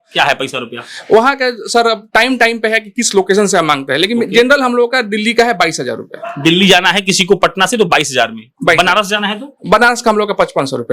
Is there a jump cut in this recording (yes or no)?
no